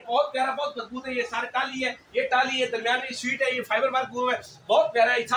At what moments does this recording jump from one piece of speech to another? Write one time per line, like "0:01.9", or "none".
none